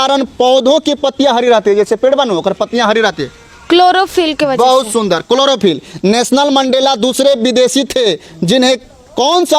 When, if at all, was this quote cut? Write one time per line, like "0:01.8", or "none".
none

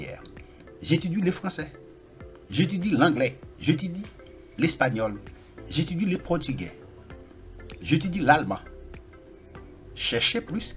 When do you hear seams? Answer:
none

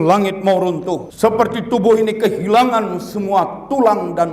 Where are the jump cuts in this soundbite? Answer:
0:01.1

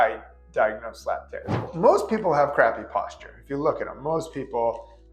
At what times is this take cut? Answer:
0:01.7

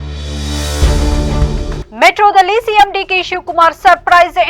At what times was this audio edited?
0:01.8

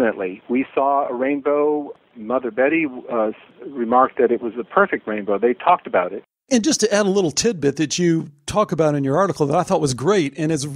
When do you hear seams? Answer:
0:02.0
0:03.5
0:06.4

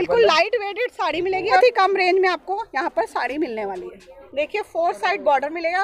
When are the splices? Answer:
0:01.6
0:04.2

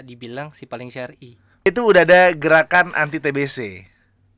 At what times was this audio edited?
0:01.7

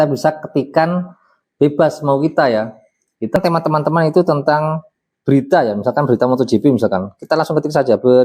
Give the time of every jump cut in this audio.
0:03.4

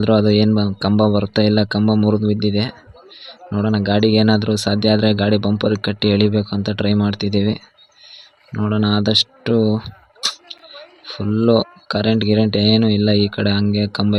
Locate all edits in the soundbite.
none

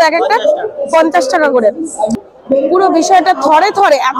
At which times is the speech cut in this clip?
0:02.2

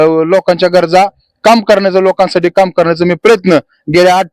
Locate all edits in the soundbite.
none

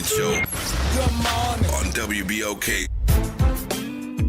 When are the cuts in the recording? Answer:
0:02.9

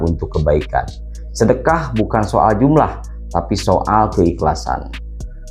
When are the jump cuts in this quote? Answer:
none

